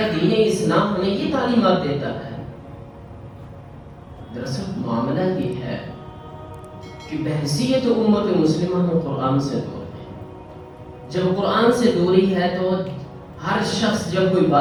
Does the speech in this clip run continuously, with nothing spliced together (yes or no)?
yes